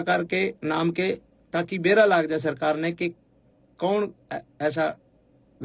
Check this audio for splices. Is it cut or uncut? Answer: uncut